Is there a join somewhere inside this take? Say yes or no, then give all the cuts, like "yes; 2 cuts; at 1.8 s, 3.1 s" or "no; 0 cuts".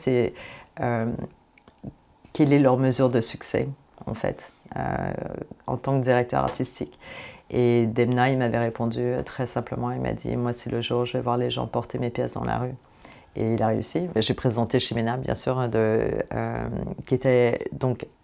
yes; 1 cut; at 14.2 s